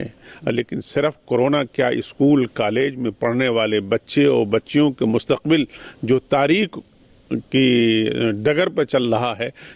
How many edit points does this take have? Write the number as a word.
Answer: zero